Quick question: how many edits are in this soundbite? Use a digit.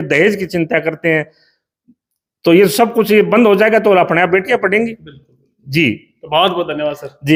0